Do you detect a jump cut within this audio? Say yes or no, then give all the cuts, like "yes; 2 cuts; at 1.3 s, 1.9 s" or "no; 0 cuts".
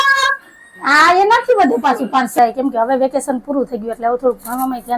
yes; 1 cut; at 2.3 s